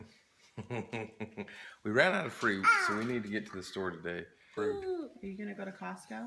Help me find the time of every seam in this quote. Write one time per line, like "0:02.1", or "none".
none

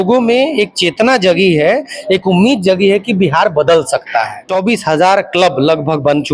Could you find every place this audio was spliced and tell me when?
0:04.5

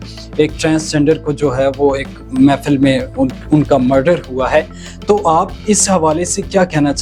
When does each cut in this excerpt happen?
none

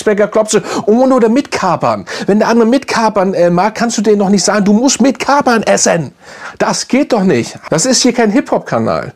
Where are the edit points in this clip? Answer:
0:07.6

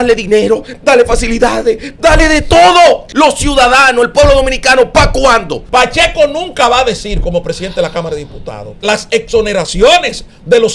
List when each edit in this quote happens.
0:03.1
0:05.6
0:08.8

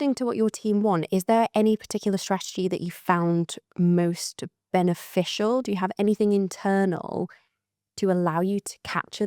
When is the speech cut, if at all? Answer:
none

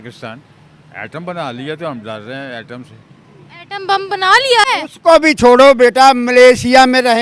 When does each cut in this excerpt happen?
0:04.7

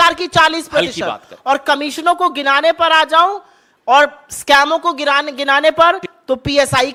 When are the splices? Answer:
none

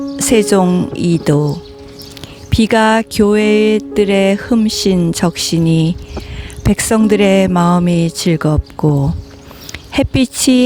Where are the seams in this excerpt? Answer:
none

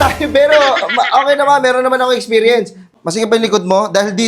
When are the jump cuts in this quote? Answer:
0:02.9

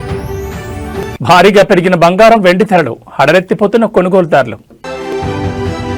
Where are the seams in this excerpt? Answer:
0:01.1
0:05.0

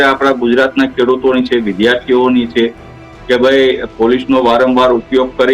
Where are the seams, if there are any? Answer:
none

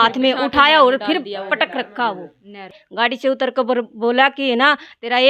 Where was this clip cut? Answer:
0:02.8

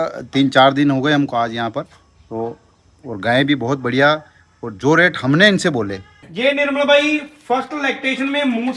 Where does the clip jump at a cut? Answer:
0:06.3

